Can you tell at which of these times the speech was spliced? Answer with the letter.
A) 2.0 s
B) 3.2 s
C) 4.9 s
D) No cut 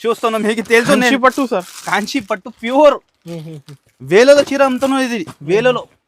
D